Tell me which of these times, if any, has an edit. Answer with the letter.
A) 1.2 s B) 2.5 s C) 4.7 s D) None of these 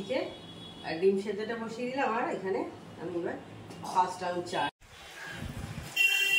C